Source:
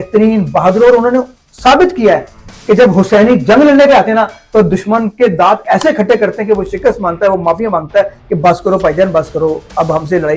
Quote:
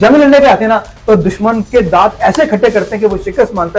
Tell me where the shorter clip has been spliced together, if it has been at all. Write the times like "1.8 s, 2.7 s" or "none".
none